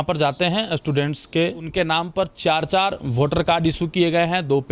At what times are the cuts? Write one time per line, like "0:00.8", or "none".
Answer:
0:01.6